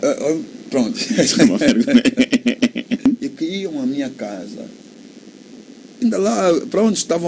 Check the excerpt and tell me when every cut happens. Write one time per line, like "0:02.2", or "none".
0:03.1